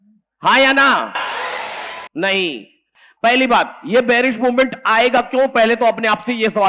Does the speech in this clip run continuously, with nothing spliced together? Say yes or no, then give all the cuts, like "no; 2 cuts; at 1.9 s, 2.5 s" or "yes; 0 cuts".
no; 1 cut; at 2.9 s